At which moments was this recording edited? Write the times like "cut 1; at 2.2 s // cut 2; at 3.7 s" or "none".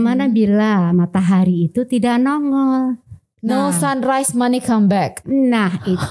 none